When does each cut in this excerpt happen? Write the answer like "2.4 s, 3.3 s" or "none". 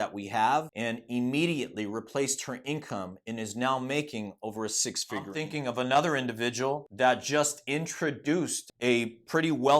5.3 s